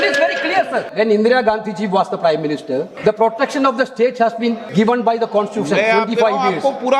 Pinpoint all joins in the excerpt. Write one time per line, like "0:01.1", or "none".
0:00.9
0:02.9
0:04.6